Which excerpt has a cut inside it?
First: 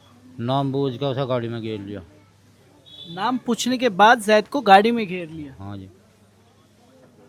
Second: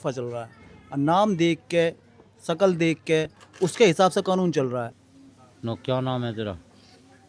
second; 1 cut; at 5.0 s

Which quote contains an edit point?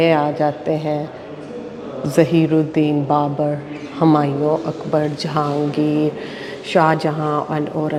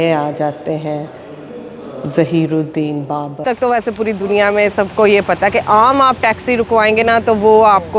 second; 1 cut; at 3.4 s

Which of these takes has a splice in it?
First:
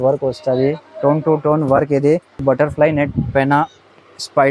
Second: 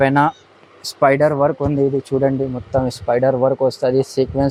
first; 1 cut; at 2.3 s

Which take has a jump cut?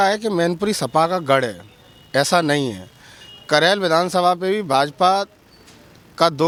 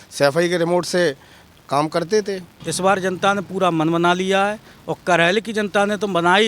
second; 1 cut; at 2.6 s

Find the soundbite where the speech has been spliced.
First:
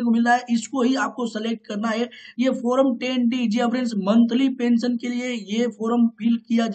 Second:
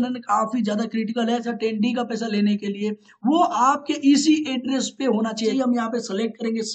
second; 2 cuts; at 1.5 s, 5.5 s

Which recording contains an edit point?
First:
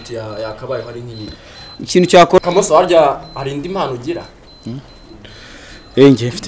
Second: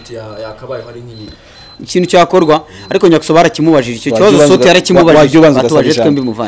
first; 1 cut; at 2.4 s

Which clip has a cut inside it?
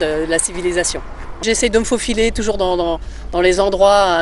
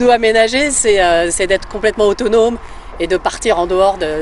first; 1 cut; at 1.4 s

